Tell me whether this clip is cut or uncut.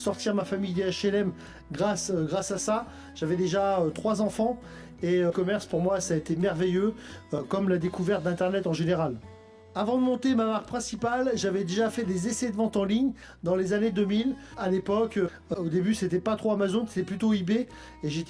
uncut